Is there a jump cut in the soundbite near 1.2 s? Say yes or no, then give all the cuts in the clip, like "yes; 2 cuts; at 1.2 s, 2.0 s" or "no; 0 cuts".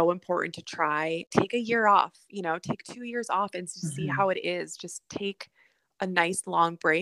yes; 1 cut; at 1.2 s